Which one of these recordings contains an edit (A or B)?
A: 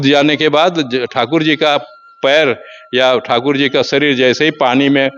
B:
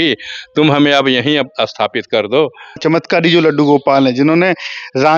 B